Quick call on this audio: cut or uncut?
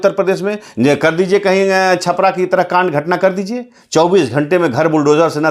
uncut